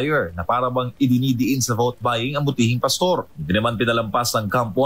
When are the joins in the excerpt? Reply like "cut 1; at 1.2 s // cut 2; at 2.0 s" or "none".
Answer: none